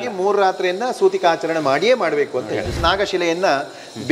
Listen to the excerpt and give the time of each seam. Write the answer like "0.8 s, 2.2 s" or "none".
2.8 s